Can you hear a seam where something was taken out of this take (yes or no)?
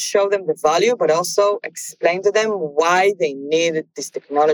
yes